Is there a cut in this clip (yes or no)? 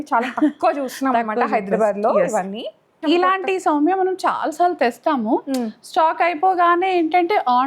yes